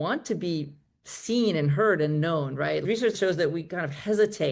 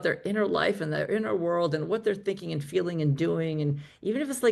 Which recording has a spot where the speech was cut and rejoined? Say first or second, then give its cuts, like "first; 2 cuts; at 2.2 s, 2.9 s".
first; 1 cut; at 3.2 s